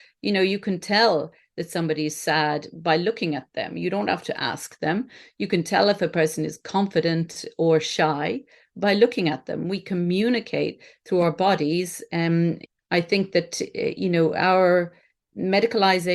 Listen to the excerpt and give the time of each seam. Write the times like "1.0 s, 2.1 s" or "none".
12.6 s